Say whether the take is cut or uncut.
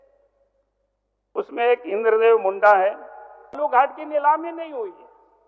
cut